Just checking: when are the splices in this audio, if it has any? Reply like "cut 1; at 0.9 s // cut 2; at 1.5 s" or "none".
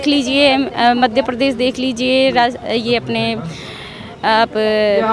none